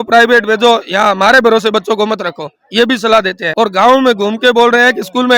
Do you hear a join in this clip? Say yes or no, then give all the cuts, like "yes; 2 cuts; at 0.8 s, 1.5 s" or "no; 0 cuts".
no; 0 cuts